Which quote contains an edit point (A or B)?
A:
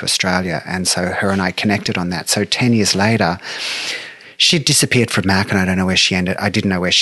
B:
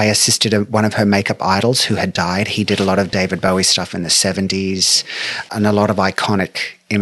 B